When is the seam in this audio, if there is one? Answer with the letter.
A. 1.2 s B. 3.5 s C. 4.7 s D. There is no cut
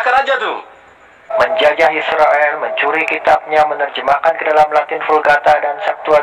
A